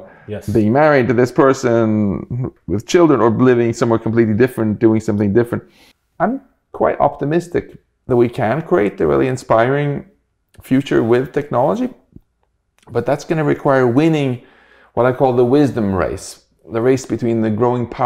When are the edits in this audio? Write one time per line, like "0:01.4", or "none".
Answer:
0:05.8